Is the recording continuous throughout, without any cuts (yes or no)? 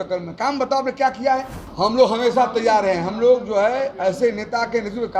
no